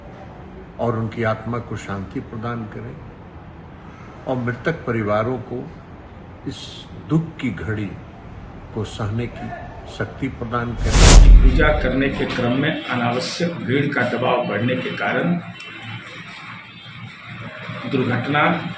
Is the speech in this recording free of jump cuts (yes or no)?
no